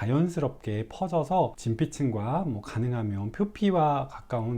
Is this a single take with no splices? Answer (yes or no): no